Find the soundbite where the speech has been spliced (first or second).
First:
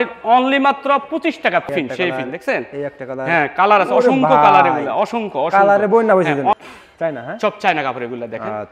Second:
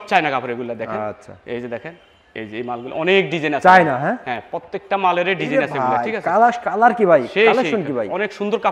first